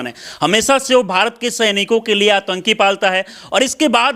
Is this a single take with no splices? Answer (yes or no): yes